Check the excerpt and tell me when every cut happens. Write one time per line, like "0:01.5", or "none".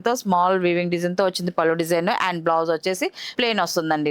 0:03.2